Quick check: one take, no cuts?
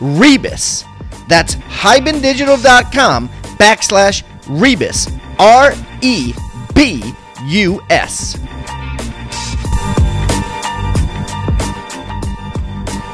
no; 1 cut; at 8.1 s

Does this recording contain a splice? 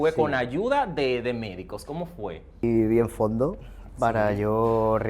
yes; 1 cut; at 2.6 s

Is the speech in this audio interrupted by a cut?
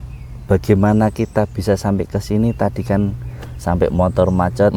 no; 0 cuts

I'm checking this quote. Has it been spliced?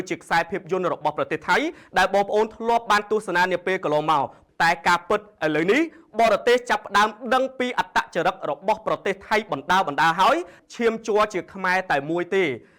yes; 2 cuts; at 4.4 s, 10.6 s

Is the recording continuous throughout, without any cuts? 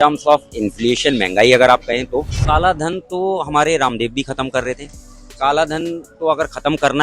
no; 1 cut; at 2.3 s

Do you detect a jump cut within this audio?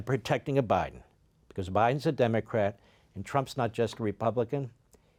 no; 0 cuts

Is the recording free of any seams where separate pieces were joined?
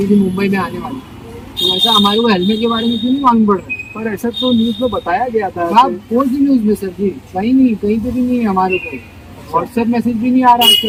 yes; 0 cuts

